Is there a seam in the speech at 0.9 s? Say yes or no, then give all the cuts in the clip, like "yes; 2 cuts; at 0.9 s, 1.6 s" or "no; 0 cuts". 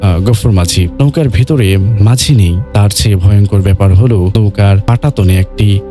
yes; 3 cuts; at 0.9 s, 2.6 s, 4.6 s